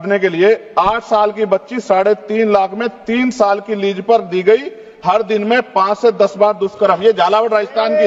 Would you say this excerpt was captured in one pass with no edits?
yes; 0 cuts

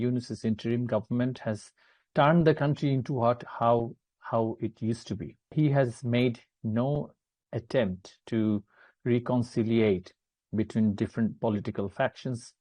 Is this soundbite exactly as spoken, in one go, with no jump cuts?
no; 1 cut; at 5.5 s

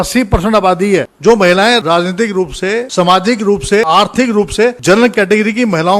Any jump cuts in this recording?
yes; 5 cuts; at 1.1 s, 1.8 s, 2.9 s, 3.9 s, 4.8 s

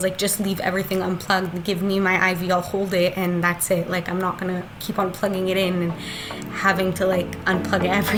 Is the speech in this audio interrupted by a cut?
no; 0 cuts

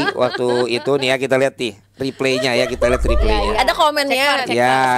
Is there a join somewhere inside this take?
no; 0 cuts

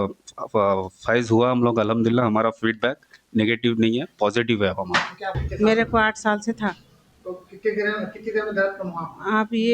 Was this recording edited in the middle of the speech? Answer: yes; 1 cut; at 5.4 s

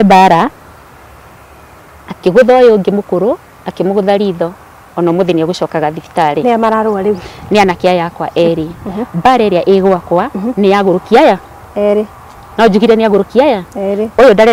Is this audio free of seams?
yes; 0 cuts

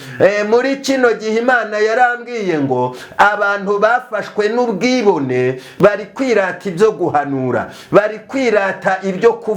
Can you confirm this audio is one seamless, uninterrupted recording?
no; 1 cut; at 5.7 s

